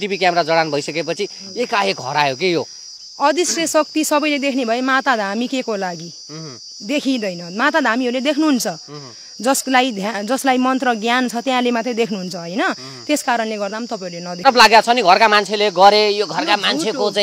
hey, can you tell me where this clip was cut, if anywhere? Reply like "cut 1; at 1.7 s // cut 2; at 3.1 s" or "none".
cut 1; at 14.5 s